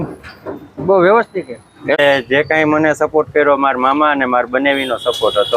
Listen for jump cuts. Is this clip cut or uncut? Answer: cut